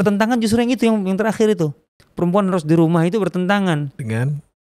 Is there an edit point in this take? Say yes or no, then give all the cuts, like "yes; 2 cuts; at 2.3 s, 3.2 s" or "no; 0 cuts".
no; 0 cuts